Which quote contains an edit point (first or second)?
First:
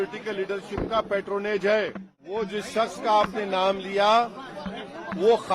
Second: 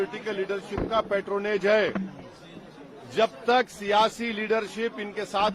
first